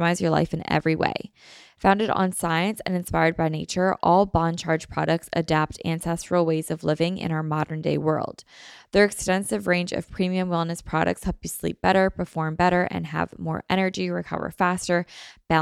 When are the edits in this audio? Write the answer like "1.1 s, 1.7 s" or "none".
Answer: none

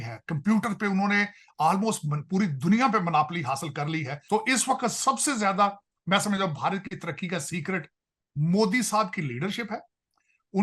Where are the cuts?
4.1 s

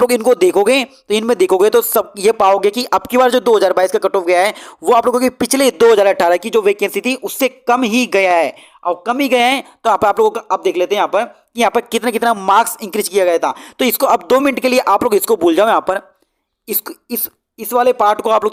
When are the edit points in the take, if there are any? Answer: none

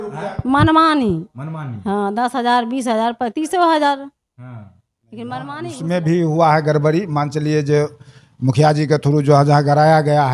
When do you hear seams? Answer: 5.8 s

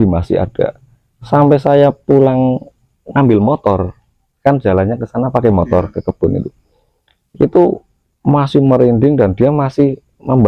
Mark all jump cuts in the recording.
none

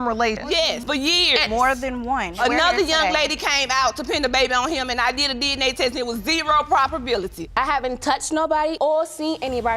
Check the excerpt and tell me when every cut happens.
7.4 s

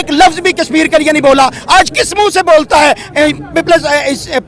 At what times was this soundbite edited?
none

